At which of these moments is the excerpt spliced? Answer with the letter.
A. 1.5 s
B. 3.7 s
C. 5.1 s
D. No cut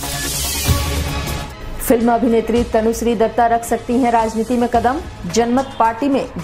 A